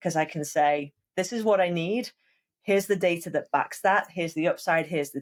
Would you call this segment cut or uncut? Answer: uncut